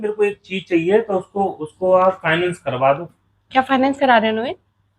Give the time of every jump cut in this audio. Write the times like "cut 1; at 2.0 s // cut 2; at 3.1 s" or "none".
cut 1; at 3.3 s